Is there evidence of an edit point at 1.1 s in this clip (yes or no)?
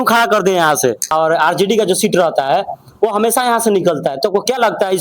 yes